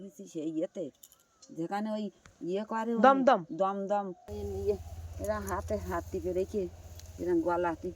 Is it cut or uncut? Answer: cut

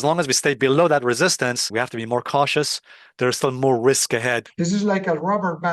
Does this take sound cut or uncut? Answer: cut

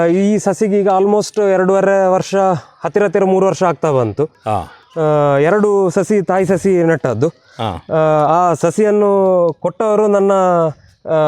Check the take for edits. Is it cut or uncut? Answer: uncut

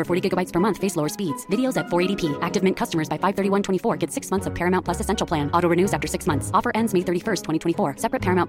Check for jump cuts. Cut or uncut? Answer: uncut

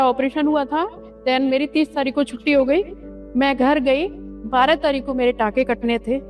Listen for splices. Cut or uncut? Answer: uncut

